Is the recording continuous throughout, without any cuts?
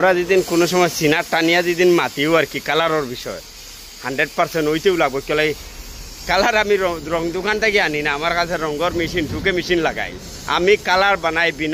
yes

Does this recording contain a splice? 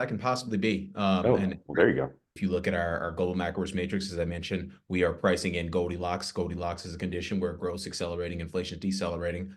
yes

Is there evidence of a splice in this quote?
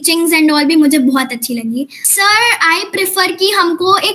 yes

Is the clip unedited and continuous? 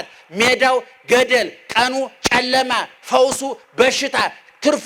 yes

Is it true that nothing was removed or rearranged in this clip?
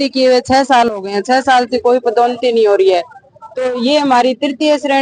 yes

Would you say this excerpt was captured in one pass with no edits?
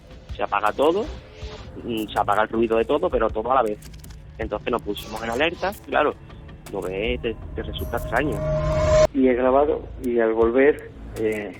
no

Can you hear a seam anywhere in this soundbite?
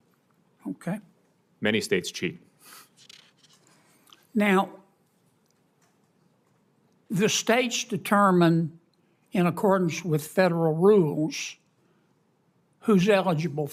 no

